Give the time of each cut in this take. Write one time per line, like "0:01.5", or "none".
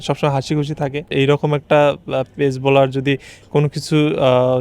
0:01.1